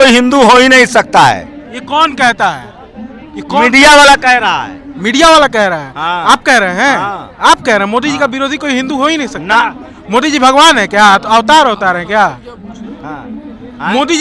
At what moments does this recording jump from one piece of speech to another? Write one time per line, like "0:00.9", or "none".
none